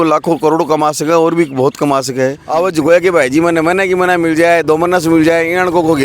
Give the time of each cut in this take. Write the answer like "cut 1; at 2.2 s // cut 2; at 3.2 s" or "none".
cut 1; at 2.4 s